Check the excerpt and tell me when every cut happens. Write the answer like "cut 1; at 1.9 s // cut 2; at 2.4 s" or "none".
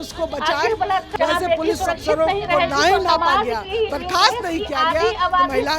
cut 1; at 1.1 s